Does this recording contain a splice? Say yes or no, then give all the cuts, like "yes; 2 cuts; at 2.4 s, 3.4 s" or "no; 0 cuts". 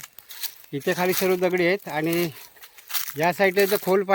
no; 0 cuts